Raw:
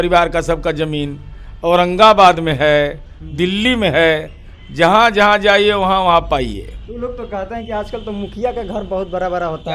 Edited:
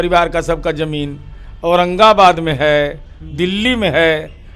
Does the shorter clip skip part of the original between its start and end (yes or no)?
no